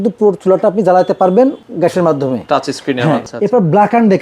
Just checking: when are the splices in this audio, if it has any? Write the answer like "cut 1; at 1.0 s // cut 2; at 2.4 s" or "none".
cut 1; at 1.6 s // cut 2; at 3.2 s